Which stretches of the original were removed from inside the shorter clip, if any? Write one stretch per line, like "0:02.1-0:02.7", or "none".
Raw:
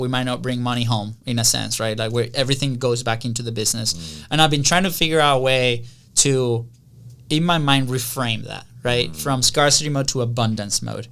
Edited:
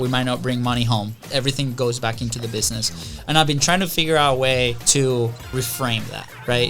0:01.2-0:02.3
0:05.9-0:06.1
0:06.8-0:07.9